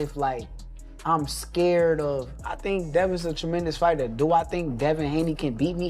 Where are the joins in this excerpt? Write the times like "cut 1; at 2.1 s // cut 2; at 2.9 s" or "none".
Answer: cut 1; at 4.1 s

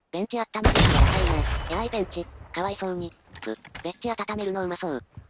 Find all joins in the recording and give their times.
none

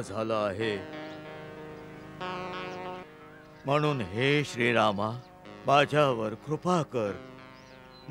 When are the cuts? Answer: cut 1; at 3.1 s

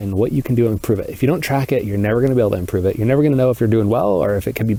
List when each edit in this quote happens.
none

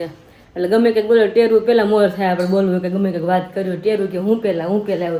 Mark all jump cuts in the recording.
none

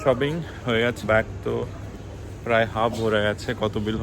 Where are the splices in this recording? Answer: cut 1; at 1.0 s

